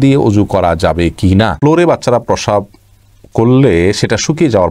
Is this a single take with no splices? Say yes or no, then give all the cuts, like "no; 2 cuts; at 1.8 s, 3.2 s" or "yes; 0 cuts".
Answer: no; 1 cut; at 1.6 s